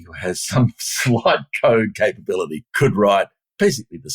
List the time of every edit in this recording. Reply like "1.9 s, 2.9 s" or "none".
2.6 s